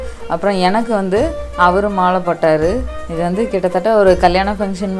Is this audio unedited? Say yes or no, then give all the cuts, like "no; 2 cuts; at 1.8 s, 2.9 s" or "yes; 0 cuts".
yes; 0 cuts